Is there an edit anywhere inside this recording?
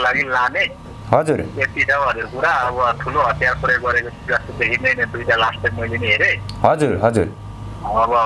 no; 0 cuts

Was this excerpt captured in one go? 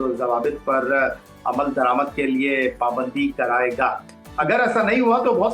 yes; 0 cuts

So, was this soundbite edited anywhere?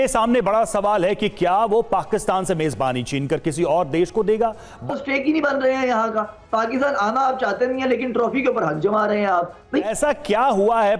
yes; 2 cuts; at 4.9 s, 9.9 s

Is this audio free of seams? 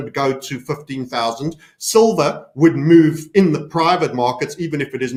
yes; 0 cuts

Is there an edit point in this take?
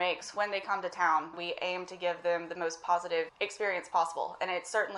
yes; 2 cuts; at 1.3 s, 3.4 s

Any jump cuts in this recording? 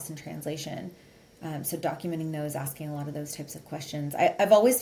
no; 0 cuts

